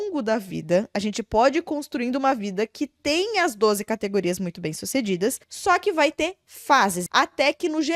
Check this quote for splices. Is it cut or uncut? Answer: cut